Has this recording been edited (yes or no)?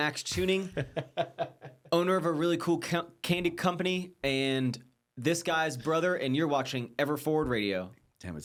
no